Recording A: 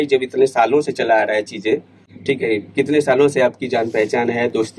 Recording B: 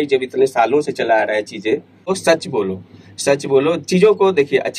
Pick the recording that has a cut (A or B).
B